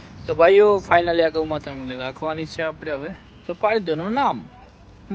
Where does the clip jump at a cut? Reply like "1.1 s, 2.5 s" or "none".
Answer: none